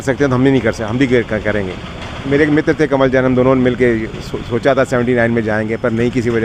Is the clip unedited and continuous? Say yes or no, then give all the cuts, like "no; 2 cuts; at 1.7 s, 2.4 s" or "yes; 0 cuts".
yes; 0 cuts